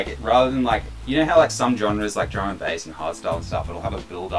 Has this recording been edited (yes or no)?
no